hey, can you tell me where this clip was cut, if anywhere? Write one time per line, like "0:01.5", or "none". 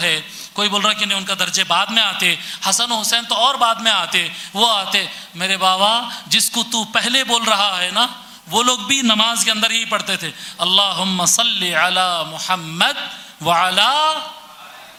none